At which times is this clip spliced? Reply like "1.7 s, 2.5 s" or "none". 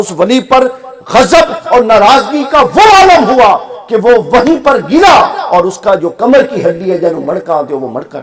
none